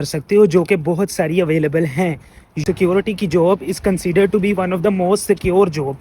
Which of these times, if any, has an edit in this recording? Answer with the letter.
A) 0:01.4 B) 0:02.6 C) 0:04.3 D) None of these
B